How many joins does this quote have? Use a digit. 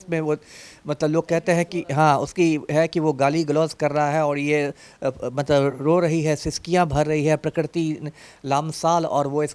0